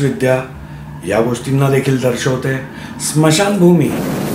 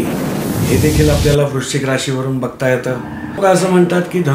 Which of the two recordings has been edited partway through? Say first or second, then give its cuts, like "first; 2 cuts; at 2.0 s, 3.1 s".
second; 1 cut; at 3.4 s